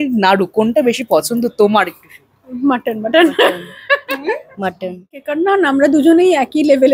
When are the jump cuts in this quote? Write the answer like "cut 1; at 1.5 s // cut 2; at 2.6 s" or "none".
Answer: cut 1; at 5.2 s